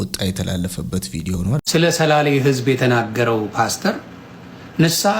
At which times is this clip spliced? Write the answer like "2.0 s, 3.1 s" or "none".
1.6 s